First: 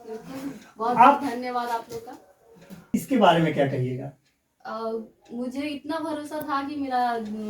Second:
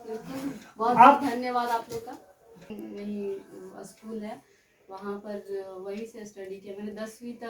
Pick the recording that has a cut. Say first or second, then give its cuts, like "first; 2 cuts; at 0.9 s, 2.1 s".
second; 1 cut; at 2.7 s